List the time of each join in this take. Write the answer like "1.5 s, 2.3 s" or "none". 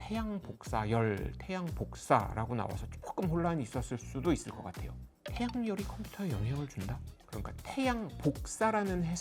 7.2 s